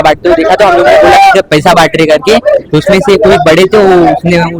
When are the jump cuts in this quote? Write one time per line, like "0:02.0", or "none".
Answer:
none